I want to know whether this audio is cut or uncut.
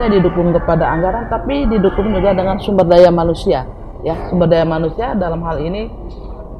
uncut